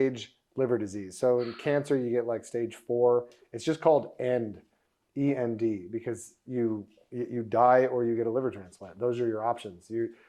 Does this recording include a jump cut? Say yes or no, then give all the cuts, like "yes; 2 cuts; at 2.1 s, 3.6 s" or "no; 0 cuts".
no; 0 cuts